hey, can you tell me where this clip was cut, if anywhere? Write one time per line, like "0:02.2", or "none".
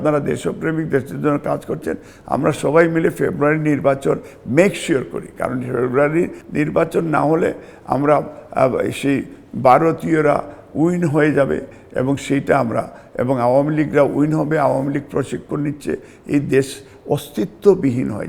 none